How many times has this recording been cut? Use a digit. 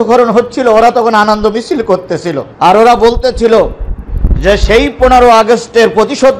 1